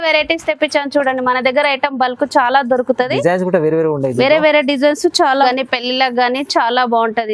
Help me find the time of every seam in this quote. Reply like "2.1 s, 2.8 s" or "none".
5.4 s